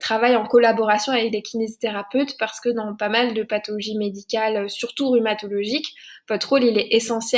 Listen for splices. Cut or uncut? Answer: uncut